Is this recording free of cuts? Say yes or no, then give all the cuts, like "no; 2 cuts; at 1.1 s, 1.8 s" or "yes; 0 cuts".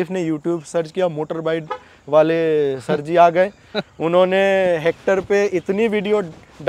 yes; 0 cuts